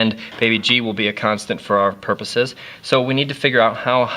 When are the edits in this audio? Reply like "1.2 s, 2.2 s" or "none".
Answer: 1.0 s